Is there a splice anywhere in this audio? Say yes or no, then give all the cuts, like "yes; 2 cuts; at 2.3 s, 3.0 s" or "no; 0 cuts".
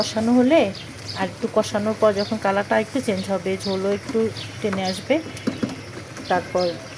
no; 0 cuts